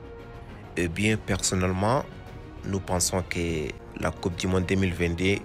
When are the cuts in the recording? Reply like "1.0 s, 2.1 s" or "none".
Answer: 3.8 s